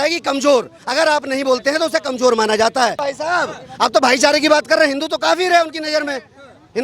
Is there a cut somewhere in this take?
yes; 1 cut; at 3.0 s

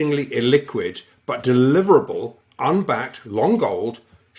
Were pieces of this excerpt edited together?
no; 0 cuts

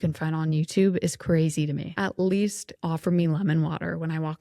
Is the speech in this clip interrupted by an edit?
yes; 2 cuts; at 1.9 s, 2.7 s

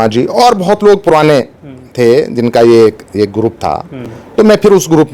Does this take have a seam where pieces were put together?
no; 0 cuts

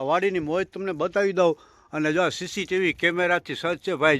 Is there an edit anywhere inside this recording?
no; 0 cuts

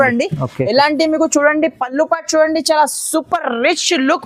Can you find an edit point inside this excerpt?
no; 0 cuts

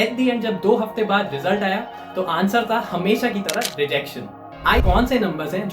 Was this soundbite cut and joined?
yes; 1 cut; at 4.8 s

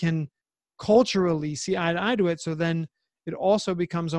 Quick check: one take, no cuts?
yes; 0 cuts

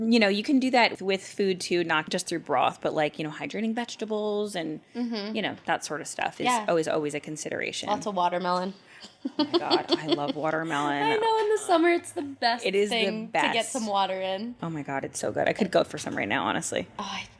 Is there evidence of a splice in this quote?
yes; 2 cuts; at 0.9 s, 2.0 s

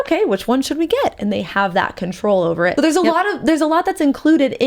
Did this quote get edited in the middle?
yes; 1 cut; at 2.7 s

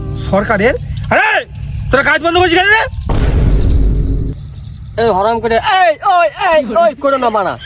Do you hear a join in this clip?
yes; 2 cuts; at 3.0 s, 4.3 s

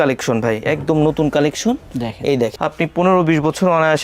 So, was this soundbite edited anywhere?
yes; 1 cut; at 2.6 s

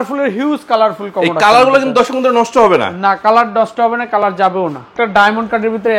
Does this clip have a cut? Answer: yes; 1 cut; at 4.9 s

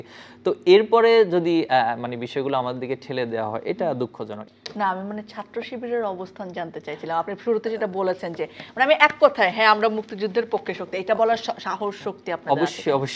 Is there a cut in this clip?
yes; 1 cut; at 4.3 s

